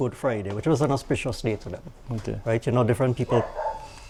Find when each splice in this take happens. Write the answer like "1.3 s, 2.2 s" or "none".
none

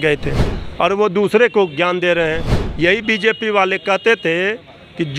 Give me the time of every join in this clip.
none

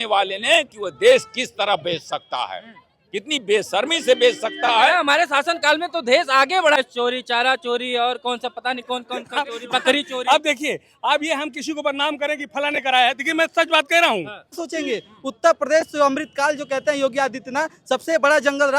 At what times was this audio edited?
6.8 s, 14.6 s

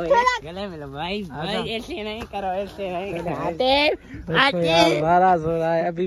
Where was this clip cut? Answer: 3.1 s

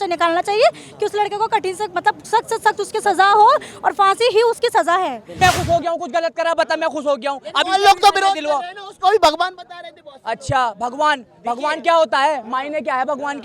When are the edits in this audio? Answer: 5.2 s

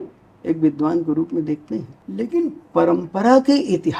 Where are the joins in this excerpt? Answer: 2.0 s

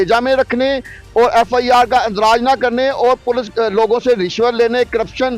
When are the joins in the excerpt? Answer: none

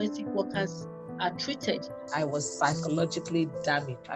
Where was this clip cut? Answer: 2.0 s

